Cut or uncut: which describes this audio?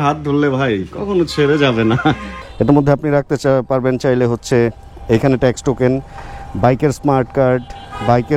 cut